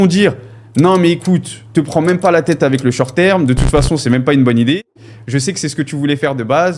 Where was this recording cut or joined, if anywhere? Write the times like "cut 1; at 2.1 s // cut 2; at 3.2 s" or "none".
none